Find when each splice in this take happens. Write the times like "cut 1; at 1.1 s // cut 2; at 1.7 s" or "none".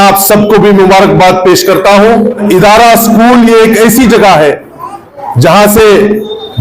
cut 1; at 2.4 s